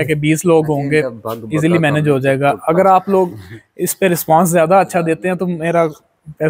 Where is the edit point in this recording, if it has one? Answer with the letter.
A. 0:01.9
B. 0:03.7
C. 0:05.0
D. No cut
D